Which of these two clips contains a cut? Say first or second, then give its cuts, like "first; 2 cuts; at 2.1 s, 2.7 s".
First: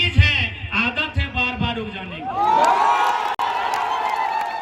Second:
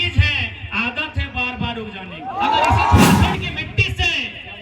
second; 1 cut; at 3.3 s